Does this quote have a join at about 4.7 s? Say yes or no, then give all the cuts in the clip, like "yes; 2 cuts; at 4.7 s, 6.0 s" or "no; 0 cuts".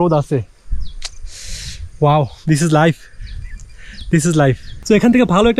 yes; 1 cut; at 4.7 s